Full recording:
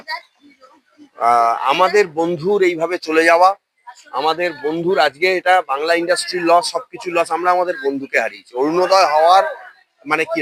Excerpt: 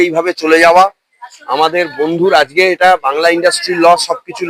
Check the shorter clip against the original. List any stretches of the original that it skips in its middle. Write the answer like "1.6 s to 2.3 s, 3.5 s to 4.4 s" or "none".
none